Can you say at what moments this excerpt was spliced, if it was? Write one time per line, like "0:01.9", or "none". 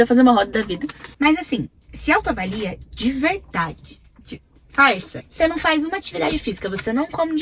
0:01.0
0:05.2